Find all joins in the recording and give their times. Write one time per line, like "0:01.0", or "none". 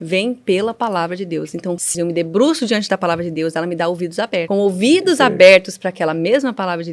0:01.9
0:04.5